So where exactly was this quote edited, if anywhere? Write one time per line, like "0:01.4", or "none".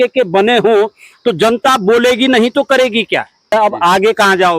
0:03.5

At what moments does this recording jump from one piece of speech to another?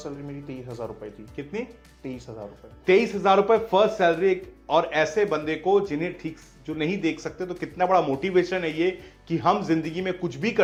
none

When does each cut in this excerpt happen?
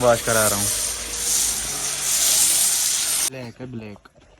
0:03.3

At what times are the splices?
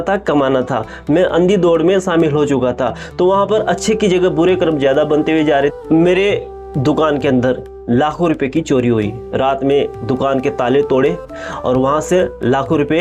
0:05.7

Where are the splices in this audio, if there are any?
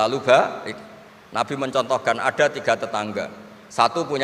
none

